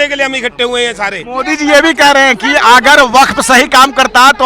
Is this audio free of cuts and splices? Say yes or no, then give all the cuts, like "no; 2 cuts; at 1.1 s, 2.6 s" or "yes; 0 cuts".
no; 1 cut; at 1.3 s